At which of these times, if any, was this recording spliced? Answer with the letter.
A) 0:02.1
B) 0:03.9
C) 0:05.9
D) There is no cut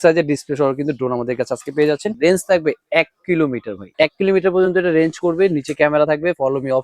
A